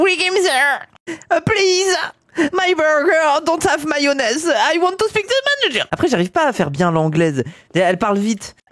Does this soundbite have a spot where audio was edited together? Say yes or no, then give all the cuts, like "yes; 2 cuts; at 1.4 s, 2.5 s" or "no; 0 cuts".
yes; 2 cuts; at 0.9 s, 5.9 s